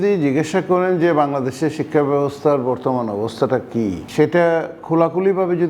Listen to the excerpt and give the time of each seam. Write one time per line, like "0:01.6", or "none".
0:04.0